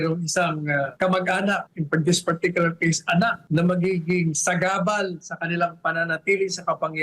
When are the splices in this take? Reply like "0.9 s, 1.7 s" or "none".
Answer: 0.9 s, 1.7 s, 3.4 s